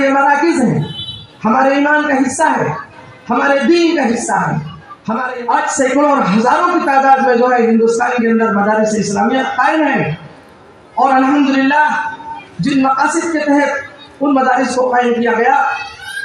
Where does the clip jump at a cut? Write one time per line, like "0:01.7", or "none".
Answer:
0:05.2